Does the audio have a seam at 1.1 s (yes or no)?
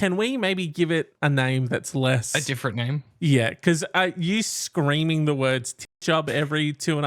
yes